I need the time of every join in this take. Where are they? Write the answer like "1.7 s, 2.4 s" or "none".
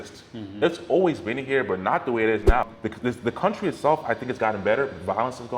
2.6 s